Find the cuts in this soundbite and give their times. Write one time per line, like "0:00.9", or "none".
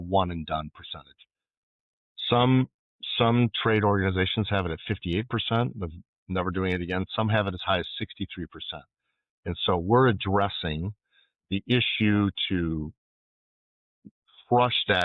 none